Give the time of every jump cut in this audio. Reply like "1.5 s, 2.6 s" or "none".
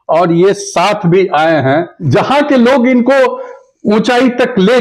2.0 s